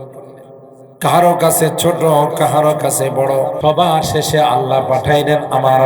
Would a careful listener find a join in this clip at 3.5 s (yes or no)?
yes